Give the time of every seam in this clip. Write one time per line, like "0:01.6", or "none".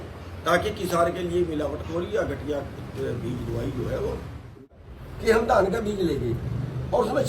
0:04.7